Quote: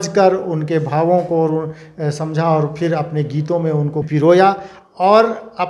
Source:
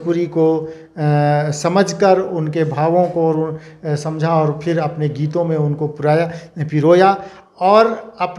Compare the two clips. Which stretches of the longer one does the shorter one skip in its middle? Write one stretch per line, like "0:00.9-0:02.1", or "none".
0:05.9-0:06.7